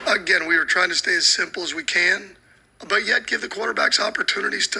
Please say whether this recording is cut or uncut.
uncut